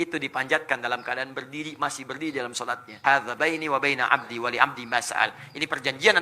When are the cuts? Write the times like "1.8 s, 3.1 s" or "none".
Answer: 2.9 s